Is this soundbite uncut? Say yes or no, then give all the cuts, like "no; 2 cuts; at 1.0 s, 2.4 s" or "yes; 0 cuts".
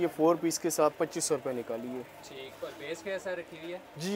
yes; 0 cuts